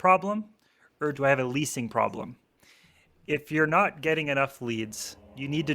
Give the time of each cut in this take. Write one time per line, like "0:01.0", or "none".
0:00.9